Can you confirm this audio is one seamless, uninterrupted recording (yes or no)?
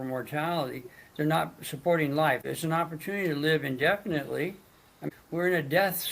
no